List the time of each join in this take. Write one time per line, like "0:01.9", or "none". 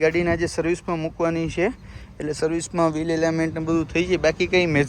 none